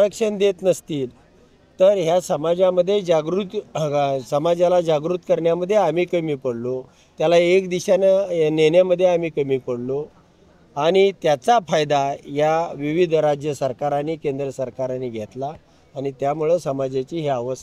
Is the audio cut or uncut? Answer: uncut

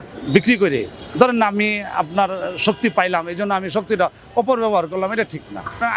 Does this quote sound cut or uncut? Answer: uncut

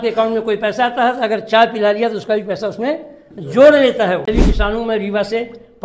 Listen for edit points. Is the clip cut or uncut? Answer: cut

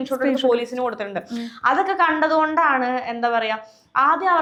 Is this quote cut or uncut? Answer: uncut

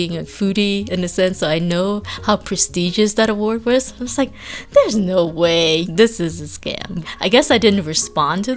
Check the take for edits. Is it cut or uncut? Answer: cut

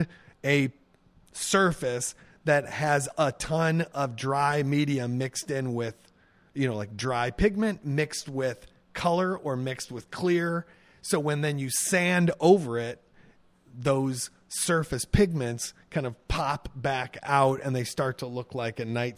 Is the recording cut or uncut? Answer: uncut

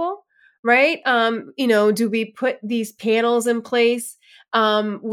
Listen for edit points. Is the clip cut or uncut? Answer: uncut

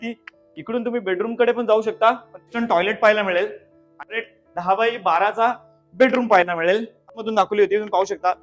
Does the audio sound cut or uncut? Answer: cut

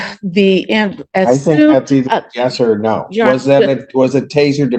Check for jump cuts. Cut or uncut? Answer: uncut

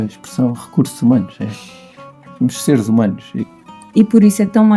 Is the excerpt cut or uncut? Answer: cut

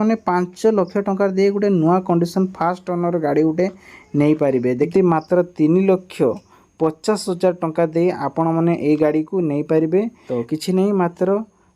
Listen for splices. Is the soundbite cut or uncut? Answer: cut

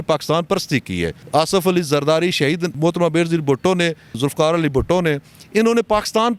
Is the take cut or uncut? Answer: uncut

